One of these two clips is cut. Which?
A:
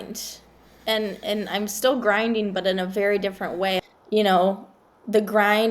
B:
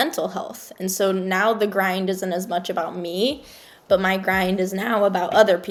A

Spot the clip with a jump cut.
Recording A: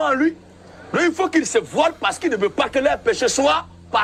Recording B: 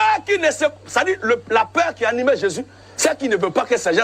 B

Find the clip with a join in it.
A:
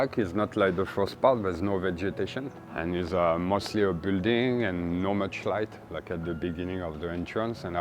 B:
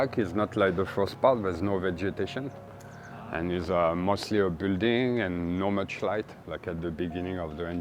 A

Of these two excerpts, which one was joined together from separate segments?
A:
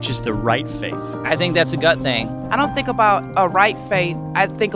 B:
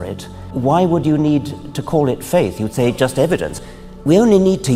A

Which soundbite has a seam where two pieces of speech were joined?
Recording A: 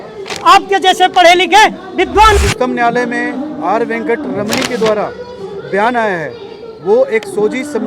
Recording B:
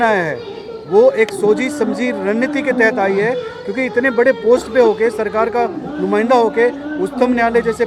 A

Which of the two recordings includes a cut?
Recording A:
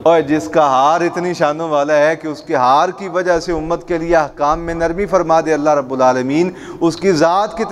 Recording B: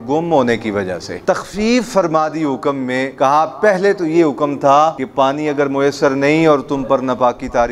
B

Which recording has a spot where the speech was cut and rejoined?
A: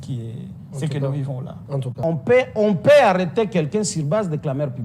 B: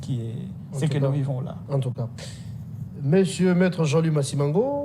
A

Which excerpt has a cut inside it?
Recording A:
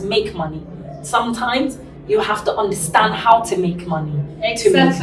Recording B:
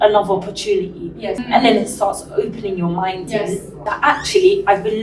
B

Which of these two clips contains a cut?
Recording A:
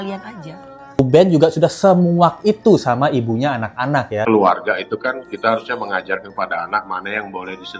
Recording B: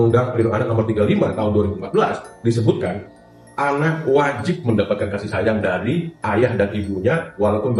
A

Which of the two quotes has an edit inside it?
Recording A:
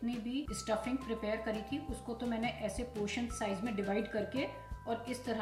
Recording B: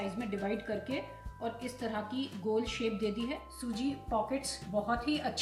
B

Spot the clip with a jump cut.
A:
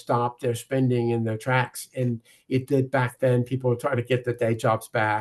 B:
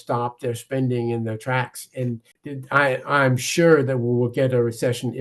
B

